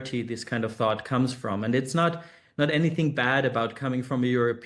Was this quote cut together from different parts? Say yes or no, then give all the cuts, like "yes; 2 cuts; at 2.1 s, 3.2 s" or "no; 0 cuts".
no; 0 cuts